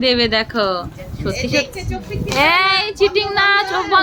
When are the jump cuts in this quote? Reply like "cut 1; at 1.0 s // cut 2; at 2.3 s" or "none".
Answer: none